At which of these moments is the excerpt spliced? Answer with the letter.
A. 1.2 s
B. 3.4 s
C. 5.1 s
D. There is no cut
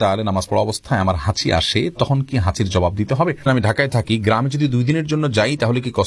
B